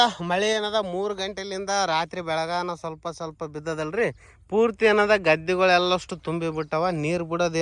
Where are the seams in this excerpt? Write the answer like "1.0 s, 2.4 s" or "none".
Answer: none